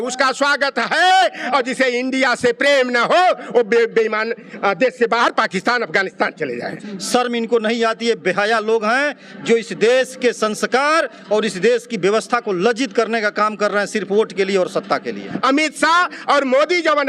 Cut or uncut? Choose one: cut